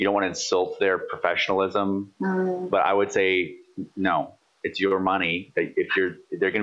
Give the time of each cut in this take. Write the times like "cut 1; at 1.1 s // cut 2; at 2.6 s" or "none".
none